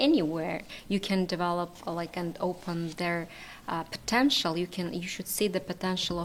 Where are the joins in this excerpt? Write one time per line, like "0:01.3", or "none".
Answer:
none